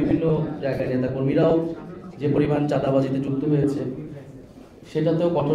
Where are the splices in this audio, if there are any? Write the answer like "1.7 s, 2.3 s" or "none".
none